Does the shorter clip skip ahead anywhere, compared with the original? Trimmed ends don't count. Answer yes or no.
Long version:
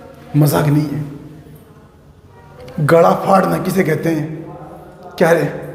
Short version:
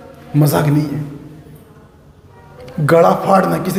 no